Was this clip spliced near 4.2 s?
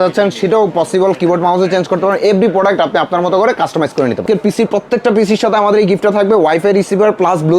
yes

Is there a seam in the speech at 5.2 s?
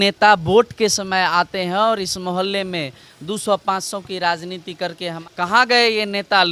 yes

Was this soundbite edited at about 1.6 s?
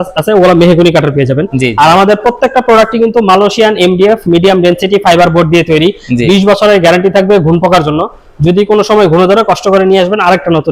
no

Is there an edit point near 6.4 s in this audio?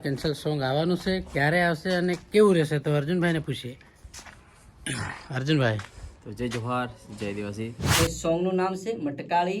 no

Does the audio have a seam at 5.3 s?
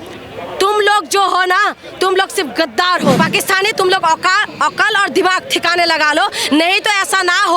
no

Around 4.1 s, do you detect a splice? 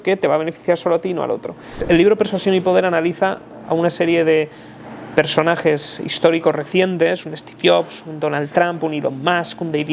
no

